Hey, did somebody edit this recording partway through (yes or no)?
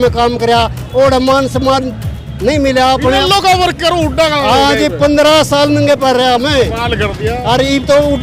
no